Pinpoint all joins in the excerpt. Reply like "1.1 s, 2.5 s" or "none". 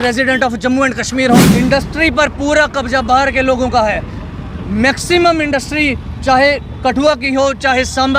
1.4 s